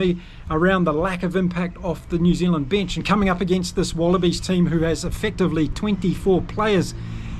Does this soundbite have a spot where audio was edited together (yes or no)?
yes